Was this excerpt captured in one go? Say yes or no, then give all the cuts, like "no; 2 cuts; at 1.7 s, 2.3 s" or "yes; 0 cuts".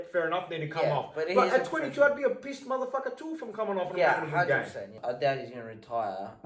no; 1 cut; at 5.0 s